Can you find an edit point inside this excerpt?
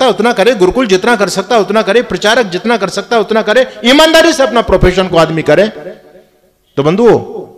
no; 0 cuts

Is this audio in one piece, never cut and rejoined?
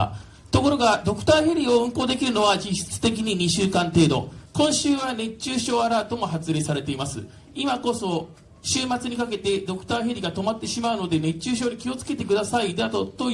no; 1 cut; at 4.4 s

